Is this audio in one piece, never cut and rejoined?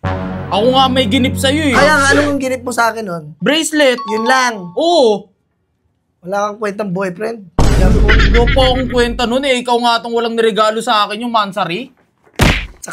no; 1 cut; at 3.2 s

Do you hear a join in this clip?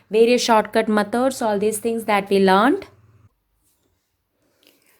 no; 0 cuts

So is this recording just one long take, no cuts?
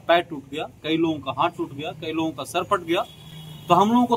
yes; 0 cuts

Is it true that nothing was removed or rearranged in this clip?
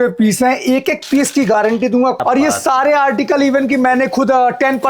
no; 1 cut; at 2.2 s

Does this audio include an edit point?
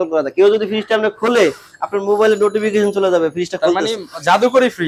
no; 0 cuts

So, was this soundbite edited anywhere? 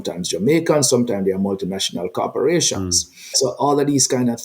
yes; 1 cut; at 3.3 s

